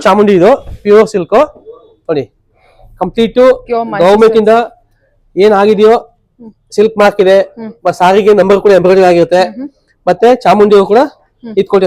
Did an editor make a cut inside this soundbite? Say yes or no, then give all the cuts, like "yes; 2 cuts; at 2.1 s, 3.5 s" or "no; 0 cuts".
no; 0 cuts